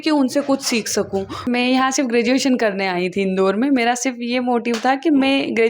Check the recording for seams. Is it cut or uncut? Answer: cut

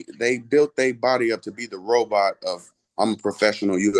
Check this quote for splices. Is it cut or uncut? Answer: uncut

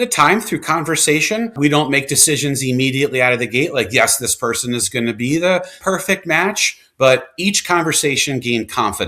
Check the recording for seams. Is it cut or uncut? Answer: cut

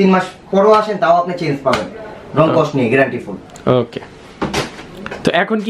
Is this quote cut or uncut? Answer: uncut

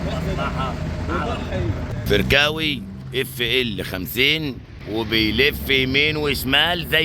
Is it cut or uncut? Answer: cut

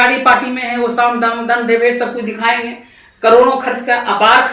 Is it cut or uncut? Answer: uncut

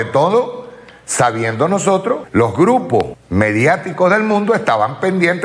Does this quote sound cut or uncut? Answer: cut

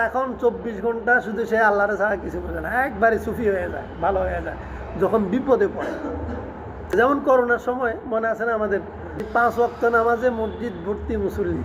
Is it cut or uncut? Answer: cut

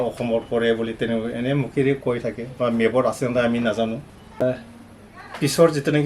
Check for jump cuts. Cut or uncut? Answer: cut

